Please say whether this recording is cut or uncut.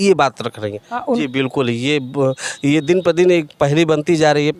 cut